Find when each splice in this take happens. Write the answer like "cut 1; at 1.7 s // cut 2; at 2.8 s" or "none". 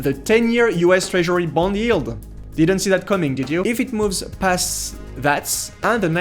cut 1; at 3.6 s